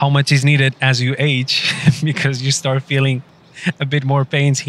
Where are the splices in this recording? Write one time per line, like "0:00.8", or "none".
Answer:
none